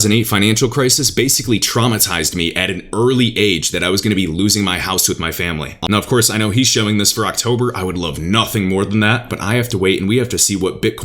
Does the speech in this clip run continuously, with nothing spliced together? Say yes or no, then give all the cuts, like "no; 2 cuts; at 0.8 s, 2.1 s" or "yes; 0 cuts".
no; 1 cut; at 5.7 s